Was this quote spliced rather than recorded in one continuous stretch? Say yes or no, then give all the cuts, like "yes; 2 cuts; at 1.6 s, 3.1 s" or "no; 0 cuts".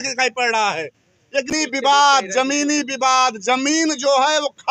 yes; 1 cut; at 1.5 s